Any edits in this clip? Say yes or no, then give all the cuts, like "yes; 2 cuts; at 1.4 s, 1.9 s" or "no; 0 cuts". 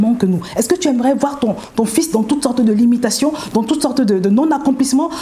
no; 0 cuts